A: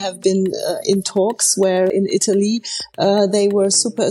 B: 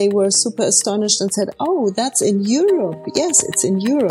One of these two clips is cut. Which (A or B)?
A